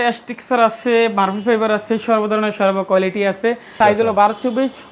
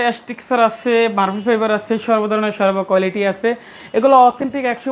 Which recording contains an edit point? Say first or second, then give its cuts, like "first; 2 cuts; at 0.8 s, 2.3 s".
first; 1 cut; at 3.8 s